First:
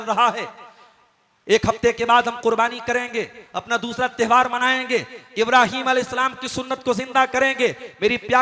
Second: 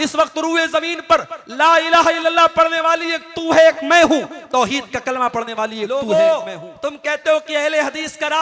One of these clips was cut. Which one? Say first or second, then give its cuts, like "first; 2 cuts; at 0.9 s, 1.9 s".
second; 1 cut; at 5.9 s